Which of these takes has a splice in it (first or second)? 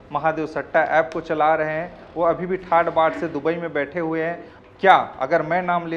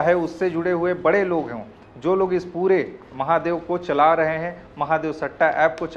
first